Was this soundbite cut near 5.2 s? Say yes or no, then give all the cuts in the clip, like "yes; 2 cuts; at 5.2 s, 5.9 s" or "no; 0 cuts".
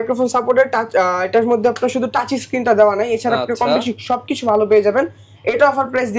no; 0 cuts